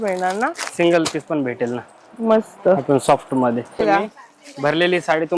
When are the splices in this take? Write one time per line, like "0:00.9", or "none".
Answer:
0:03.8